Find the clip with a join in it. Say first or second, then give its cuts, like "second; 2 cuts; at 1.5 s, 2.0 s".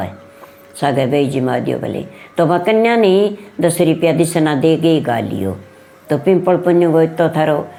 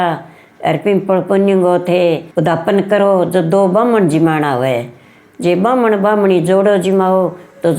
second; 1 cut; at 2.3 s